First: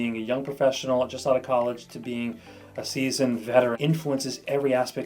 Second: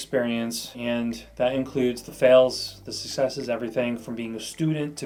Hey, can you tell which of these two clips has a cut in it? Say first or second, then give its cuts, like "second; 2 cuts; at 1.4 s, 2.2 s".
first; 1 cut; at 3.8 s